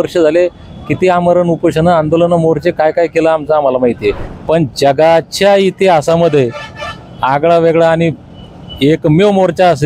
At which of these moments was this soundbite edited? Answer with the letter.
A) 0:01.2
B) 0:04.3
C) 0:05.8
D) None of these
B